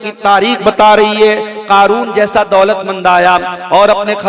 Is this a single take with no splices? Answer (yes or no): yes